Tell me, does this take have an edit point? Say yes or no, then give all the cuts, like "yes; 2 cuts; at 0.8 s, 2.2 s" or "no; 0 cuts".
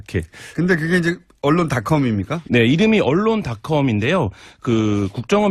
no; 0 cuts